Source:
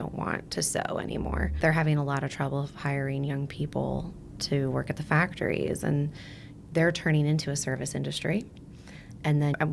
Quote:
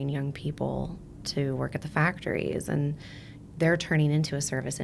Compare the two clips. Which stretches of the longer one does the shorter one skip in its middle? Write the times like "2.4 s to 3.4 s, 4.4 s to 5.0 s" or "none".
none